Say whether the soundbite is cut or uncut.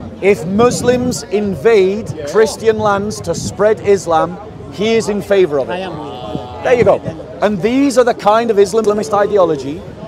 cut